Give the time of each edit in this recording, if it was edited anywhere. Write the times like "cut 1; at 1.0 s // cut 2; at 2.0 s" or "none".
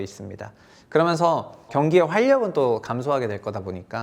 cut 1; at 1.7 s